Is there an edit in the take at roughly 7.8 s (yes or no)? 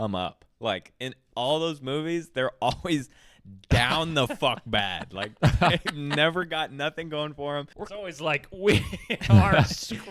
yes